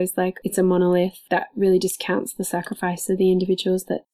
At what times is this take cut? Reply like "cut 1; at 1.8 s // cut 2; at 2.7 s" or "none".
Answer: cut 1; at 1.2 s